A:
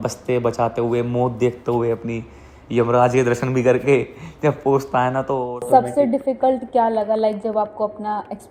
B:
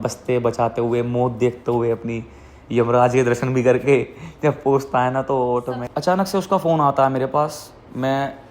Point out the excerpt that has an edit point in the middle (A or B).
B